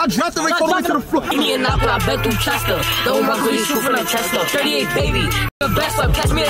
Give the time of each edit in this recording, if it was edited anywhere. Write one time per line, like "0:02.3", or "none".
0:01.3